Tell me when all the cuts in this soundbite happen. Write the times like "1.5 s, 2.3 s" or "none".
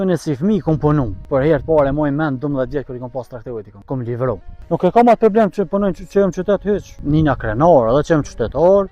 1.3 s, 3.7 s, 4.5 s, 6.9 s